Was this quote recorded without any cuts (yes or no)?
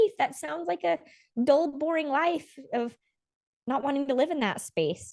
yes